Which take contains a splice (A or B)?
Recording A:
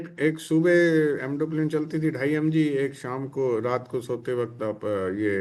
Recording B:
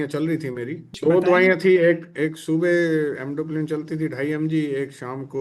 B